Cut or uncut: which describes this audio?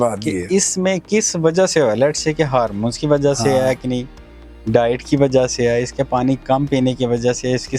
uncut